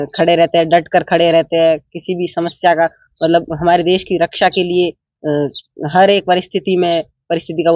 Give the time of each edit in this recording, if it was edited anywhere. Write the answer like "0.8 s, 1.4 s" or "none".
none